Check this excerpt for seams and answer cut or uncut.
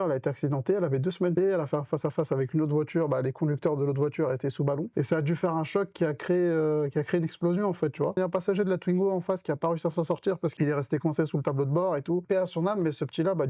cut